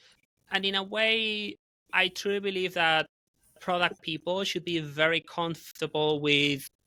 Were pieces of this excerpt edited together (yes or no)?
no